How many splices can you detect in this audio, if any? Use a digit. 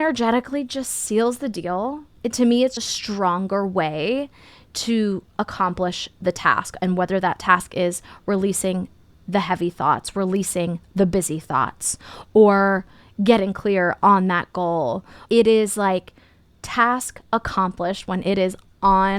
2